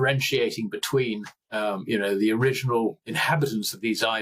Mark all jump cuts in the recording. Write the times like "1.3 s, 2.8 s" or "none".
1.4 s, 3.0 s